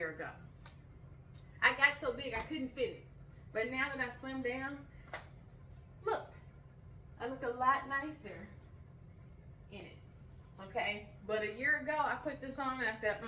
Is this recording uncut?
yes; 0 cuts

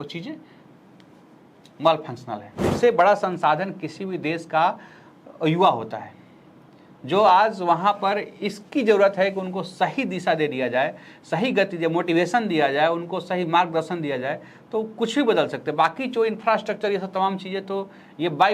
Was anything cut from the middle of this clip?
yes; 1 cut; at 2.7 s

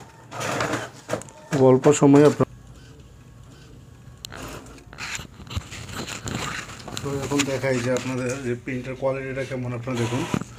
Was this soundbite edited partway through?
yes; 1 cut; at 2.4 s

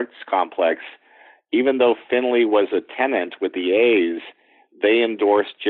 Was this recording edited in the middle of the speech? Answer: no; 0 cuts

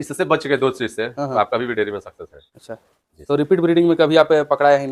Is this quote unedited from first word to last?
yes; 0 cuts

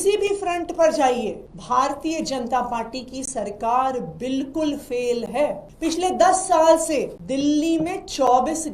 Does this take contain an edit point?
yes; 3 cuts; at 1.5 s, 5.7 s, 7.2 s

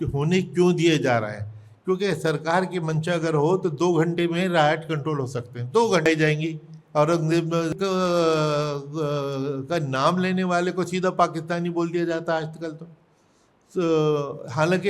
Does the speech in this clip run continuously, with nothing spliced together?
no; 2 cuts; at 6.1 s, 7.7 s

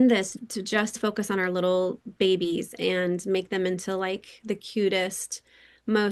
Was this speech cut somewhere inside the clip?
yes; 1 cut; at 0.9 s

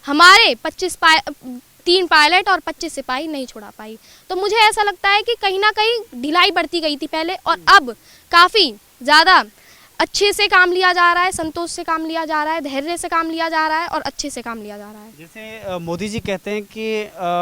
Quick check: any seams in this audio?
no; 0 cuts

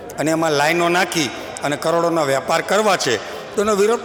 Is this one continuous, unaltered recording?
yes; 0 cuts

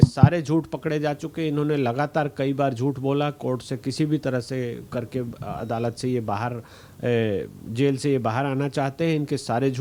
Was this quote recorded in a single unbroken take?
yes; 0 cuts

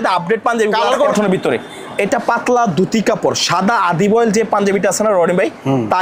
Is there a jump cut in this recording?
yes; 1 cut; at 1.1 s

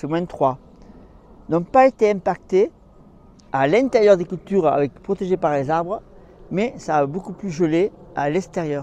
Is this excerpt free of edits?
yes; 0 cuts

